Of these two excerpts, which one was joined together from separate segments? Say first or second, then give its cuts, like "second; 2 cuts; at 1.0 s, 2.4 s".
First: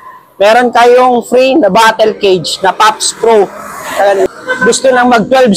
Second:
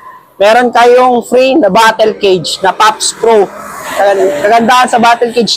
first; 1 cut; at 4.3 s